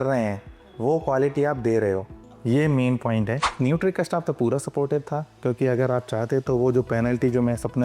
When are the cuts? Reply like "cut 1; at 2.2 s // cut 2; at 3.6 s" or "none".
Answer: cut 1; at 3.5 s